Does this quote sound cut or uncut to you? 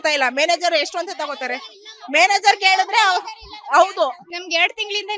cut